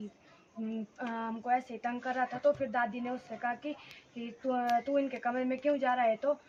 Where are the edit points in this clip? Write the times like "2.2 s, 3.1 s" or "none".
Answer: none